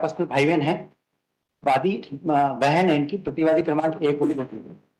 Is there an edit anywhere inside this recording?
no; 0 cuts

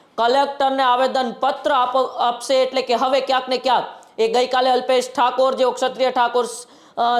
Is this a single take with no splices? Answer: yes; 0 cuts

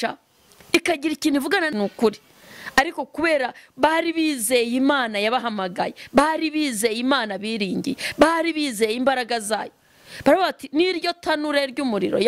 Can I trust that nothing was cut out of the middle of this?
no; 1 cut; at 1.7 s

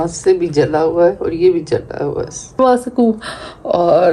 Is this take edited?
yes; 1 cut; at 2.6 s

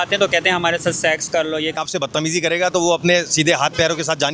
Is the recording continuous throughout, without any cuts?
no; 1 cut; at 1.8 s

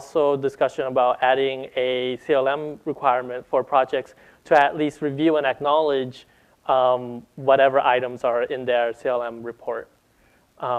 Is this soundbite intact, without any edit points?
yes; 0 cuts

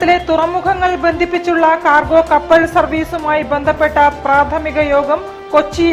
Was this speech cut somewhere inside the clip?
no; 0 cuts

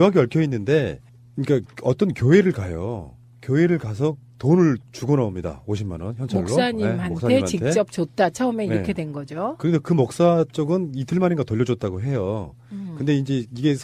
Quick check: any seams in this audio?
no; 0 cuts

